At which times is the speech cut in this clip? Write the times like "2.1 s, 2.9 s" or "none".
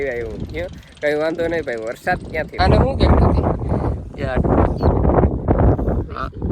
2.6 s

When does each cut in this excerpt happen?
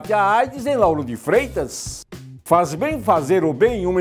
2.1 s

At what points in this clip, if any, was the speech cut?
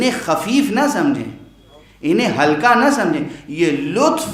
none

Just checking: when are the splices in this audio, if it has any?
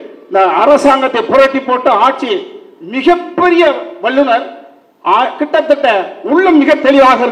none

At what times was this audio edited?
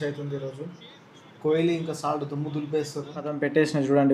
3.1 s

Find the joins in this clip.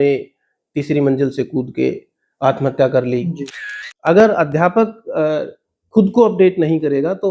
3.6 s

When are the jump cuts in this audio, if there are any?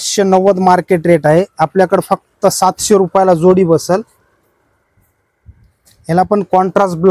none

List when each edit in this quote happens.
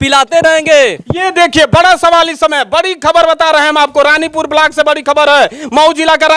1.1 s

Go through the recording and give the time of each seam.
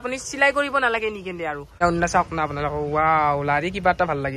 1.8 s

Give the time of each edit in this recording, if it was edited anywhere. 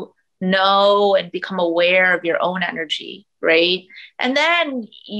none

